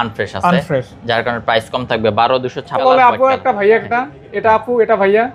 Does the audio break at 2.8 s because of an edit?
yes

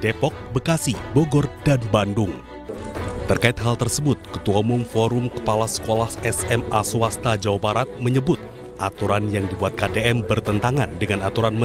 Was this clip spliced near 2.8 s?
yes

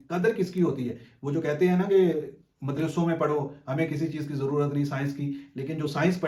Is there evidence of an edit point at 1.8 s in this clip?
no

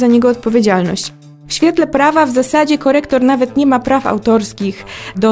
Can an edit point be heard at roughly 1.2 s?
yes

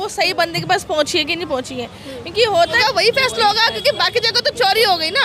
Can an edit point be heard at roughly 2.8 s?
yes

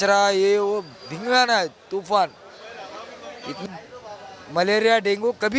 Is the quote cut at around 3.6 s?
yes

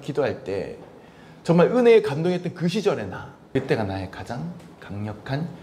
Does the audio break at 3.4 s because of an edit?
yes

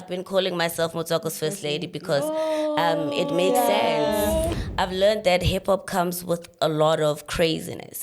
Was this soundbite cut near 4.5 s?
yes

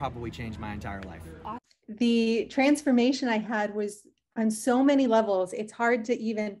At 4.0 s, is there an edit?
no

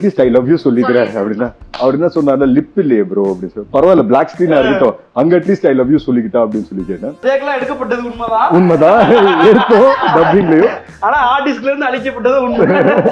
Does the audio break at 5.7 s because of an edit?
no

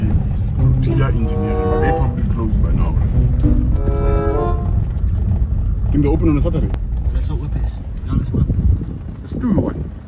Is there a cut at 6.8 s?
yes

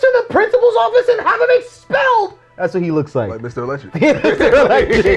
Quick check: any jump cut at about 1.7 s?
no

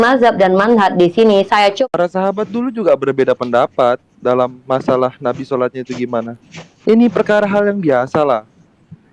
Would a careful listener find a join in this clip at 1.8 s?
yes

